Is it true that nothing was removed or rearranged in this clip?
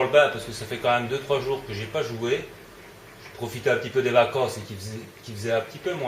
no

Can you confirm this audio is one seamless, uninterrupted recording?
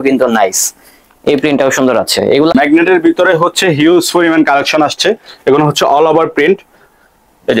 no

